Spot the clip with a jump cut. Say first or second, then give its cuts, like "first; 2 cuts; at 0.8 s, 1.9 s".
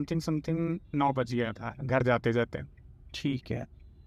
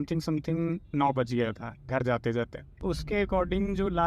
second; 1 cut; at 2.8 s